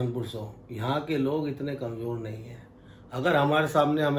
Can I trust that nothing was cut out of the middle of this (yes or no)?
yes